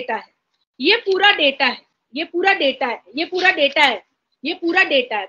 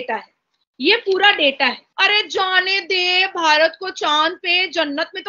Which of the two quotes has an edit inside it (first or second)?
second